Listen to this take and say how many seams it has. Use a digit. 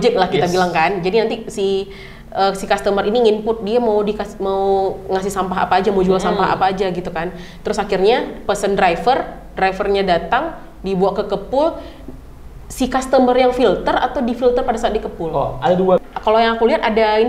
1